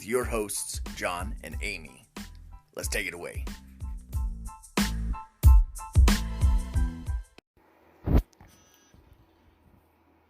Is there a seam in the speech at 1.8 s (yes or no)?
yes